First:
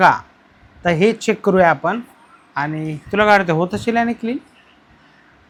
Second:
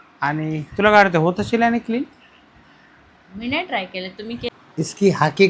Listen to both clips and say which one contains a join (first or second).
second